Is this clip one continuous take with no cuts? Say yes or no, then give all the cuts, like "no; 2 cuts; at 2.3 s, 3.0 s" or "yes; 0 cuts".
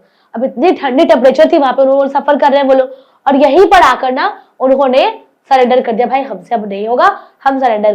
yes; 0 cuts